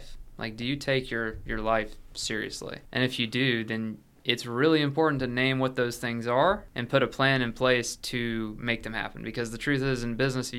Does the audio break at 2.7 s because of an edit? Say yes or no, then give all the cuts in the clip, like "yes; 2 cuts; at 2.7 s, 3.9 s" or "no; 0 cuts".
yes; 2 cuts; at 2.7 s, 6.7 s